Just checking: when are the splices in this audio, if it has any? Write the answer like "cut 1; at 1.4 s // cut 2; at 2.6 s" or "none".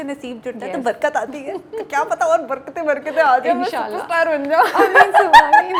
none